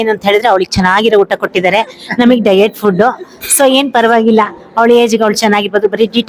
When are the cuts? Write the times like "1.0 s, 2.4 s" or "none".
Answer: none